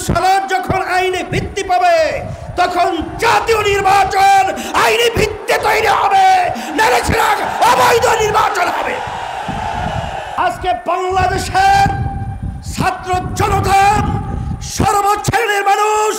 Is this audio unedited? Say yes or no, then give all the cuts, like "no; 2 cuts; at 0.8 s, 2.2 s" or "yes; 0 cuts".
no; 1 cut; at 10.3 s